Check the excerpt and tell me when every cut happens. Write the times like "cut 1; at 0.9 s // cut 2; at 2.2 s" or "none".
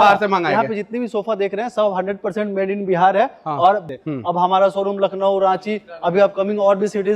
cut 1; at 4.0 s